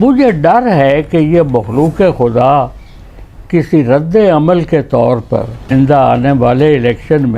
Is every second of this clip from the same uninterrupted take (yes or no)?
no